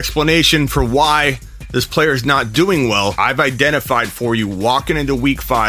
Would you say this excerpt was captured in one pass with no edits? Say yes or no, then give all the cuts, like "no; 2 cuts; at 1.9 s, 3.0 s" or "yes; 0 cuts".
no; 1 cut; at 3.1 s